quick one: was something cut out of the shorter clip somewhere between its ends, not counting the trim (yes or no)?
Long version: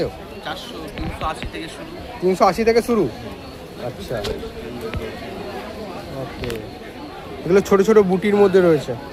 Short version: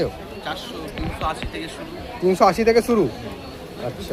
no